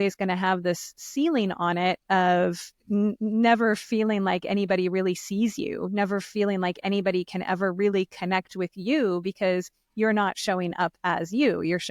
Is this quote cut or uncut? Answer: uncut